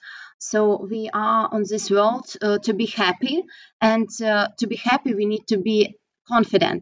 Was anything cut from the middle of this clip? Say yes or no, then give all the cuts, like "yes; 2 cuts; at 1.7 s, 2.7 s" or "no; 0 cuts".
no; 0 cuts